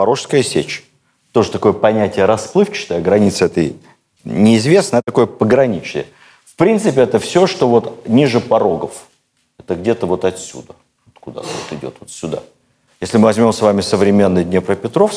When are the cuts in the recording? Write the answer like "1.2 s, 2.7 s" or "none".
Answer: none